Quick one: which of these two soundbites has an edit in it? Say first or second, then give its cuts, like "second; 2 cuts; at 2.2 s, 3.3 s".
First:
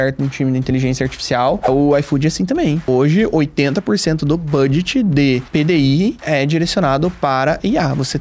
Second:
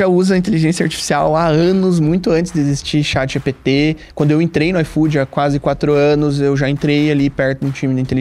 first; 4 cuts; at 1.7 s, 2.9 s, 5.5 s, 6.2 s